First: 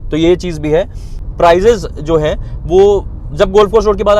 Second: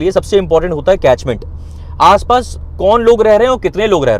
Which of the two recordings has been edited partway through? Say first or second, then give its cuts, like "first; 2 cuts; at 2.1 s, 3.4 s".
first; 1 cut; at 1.2 s